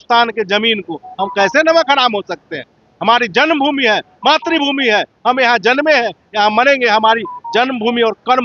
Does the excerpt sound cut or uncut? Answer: uncut